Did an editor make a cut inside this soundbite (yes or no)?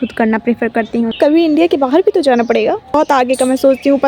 yes